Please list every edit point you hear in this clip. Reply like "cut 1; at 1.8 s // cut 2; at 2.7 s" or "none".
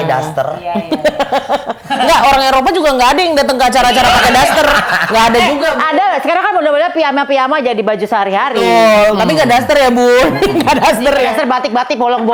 none